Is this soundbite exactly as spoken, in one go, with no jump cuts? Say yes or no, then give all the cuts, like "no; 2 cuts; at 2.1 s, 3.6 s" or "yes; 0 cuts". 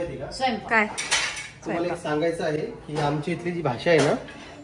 yes; 0 cuts